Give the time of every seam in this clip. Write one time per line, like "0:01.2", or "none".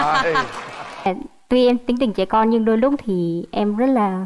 0:01.1